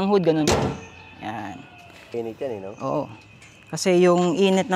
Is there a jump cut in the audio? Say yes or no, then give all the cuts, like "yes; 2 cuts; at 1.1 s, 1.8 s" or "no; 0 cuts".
yes; 1 cut; at 2.1 s